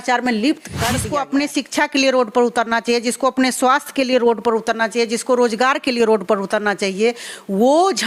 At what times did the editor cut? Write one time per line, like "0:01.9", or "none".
0:01.0